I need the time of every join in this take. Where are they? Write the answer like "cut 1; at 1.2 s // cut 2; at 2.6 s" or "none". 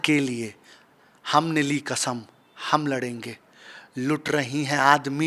none